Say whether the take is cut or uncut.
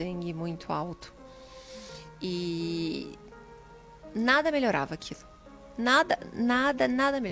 uncut